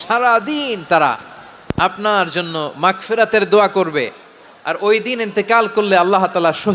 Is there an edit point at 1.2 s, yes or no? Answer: no